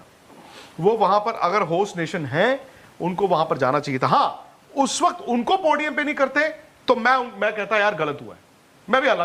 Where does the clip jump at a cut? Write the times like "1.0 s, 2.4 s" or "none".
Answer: none

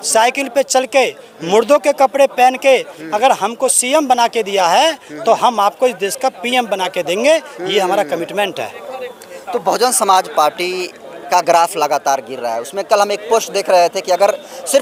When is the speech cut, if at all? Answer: none

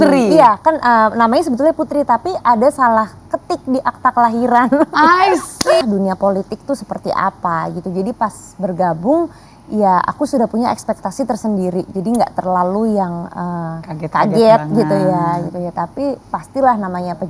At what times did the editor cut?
5.8 s

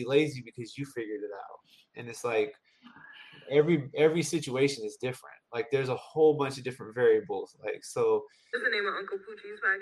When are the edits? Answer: 8.4 s

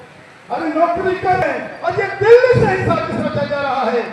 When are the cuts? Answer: 1.4 s

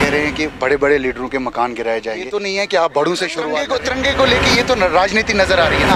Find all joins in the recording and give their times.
2.3 s, 3.6 s

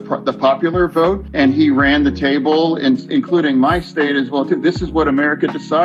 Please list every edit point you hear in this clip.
1.2 s

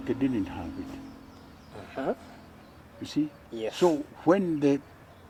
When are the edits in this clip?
none

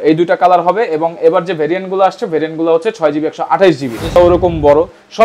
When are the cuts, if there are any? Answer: 4.2 s

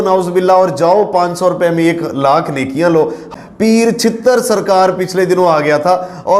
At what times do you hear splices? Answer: 3.2 s

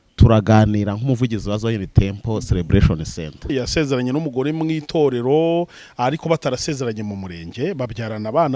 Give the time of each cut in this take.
3.5 s

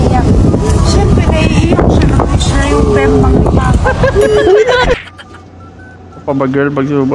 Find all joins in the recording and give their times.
5.0 s

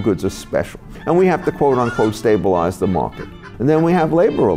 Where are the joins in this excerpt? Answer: 0.9 s, 3.2 s

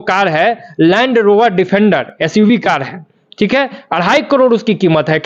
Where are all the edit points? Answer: none

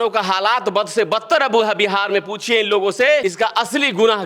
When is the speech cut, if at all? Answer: 3.2 s

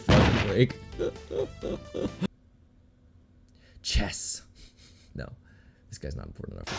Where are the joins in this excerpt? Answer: 2.3 s

